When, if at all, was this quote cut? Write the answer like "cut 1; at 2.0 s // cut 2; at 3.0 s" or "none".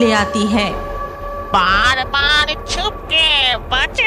cut 1; at 1.0 s